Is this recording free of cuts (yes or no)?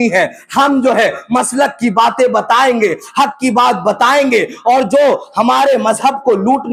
yes